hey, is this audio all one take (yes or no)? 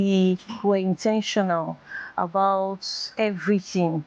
yes